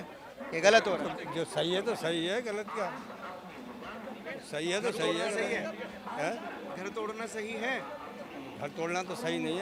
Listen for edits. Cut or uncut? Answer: uncut